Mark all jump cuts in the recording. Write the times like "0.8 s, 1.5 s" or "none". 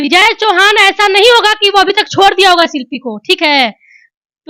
none